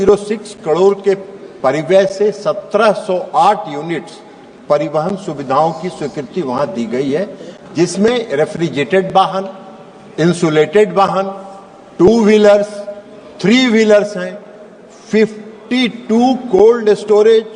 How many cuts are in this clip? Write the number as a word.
zero